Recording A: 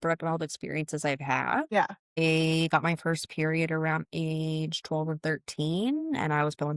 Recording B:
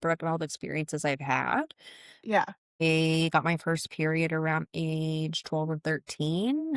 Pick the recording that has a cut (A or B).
A